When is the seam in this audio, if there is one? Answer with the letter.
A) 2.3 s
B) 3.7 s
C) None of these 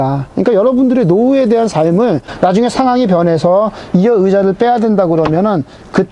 A